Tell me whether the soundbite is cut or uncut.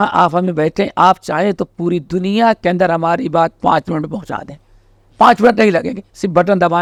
uncut